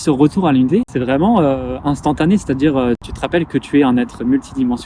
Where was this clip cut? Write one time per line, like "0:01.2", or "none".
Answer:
0:00.9
0:03.1